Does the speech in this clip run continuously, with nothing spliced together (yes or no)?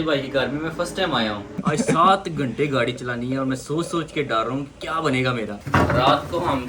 no